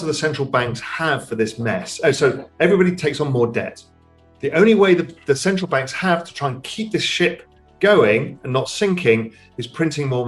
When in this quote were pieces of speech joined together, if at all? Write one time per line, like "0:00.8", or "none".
none